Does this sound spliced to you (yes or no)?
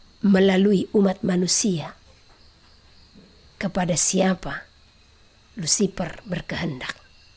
no